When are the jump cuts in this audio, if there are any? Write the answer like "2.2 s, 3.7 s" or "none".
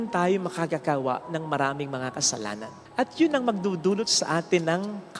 none